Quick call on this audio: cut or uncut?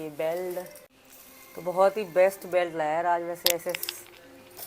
uncut